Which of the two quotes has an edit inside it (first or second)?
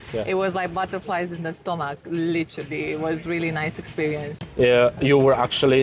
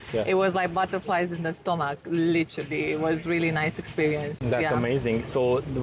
first